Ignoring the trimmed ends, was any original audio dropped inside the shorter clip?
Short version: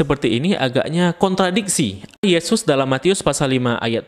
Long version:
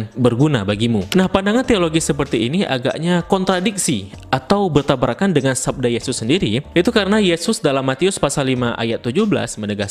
yes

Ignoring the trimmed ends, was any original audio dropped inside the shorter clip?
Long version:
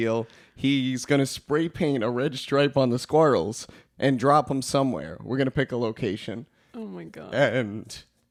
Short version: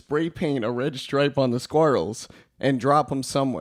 no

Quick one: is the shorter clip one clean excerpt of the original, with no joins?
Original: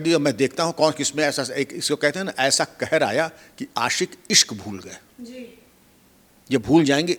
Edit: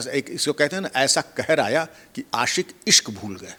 yes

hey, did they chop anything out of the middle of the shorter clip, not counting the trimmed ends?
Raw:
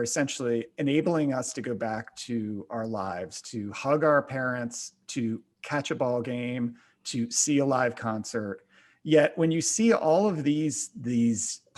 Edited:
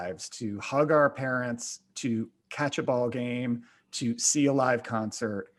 no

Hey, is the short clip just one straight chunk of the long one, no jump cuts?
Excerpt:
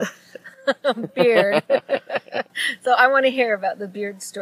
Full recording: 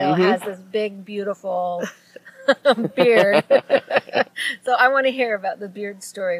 yes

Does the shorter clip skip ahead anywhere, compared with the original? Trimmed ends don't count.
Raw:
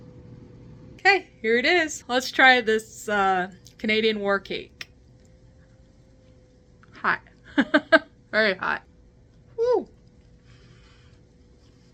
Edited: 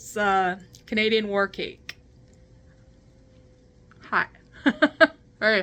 no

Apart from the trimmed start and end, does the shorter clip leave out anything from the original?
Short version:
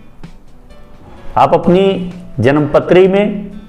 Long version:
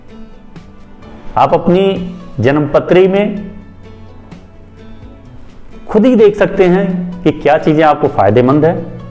no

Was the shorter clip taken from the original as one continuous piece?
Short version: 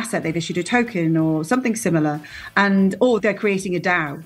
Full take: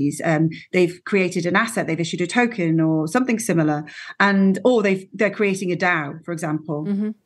no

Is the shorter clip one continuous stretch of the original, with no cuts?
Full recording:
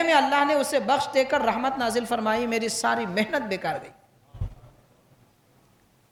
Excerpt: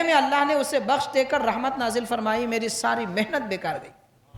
yes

